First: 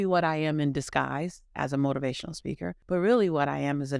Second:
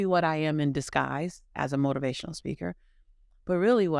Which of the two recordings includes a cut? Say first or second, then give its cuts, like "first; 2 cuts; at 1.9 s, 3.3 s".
first; 1 cut; at 2.8 s